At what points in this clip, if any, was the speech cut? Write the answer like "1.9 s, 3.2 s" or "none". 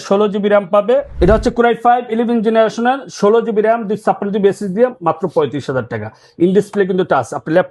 1.1 s

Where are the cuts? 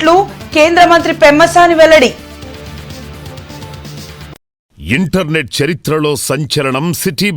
4.7 s

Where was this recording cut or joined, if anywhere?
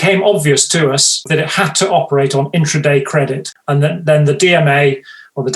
1.2 s, 3.5 s

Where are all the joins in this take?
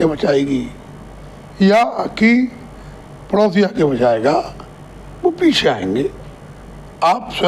none

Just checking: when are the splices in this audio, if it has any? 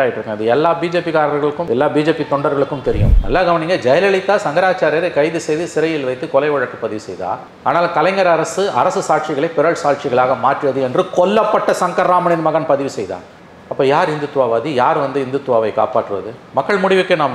3.1 s

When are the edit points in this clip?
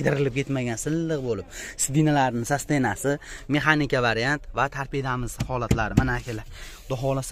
none

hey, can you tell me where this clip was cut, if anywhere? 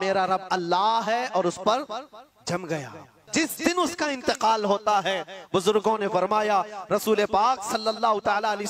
3.1 s

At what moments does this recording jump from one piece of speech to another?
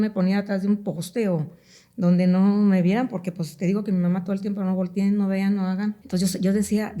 6.0 s

